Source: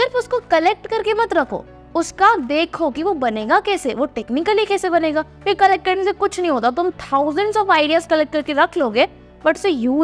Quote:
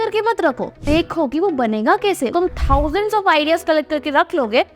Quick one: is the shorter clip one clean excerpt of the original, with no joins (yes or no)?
no